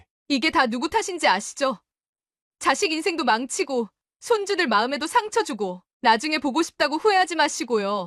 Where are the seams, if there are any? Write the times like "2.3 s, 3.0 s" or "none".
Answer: none